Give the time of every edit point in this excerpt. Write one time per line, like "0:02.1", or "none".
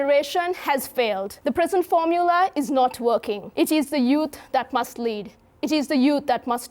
0:01.3
0:03.4